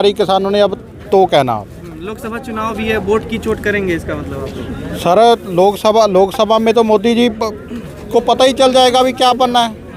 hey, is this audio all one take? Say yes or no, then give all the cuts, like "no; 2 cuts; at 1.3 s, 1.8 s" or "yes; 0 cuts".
yes; 0 cuts